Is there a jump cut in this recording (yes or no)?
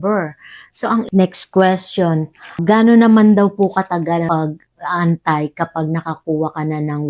yes